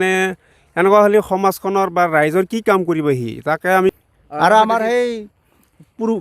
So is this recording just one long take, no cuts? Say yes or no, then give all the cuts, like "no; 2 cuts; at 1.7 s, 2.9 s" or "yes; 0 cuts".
no; 1 cut; at 3.9 s